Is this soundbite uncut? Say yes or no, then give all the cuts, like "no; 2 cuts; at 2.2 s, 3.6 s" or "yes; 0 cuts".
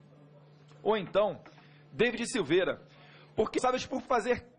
yes; 0 cuts